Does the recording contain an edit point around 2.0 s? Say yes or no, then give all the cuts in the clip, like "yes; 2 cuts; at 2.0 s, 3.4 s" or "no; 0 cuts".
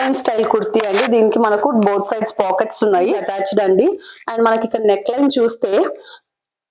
no; 1 cut; at 3.3 s